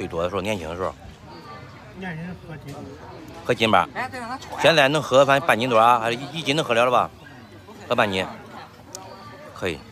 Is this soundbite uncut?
yes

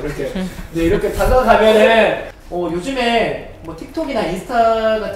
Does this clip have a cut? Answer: yes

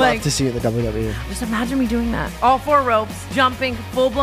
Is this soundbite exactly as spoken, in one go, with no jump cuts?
no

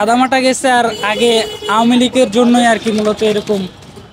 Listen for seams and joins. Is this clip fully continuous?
yes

